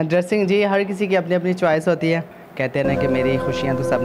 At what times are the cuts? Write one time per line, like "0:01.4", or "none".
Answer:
0:02.4